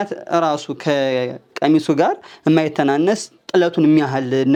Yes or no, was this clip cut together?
no